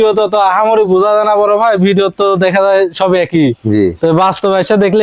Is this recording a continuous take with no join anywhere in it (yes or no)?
yes